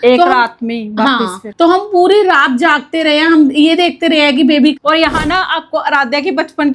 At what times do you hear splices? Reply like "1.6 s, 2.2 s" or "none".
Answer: 4.8 s